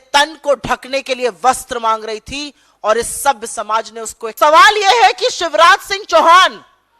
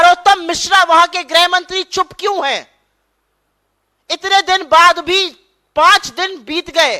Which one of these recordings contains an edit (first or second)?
first